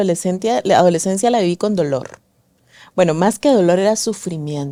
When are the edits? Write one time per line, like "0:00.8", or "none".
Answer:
none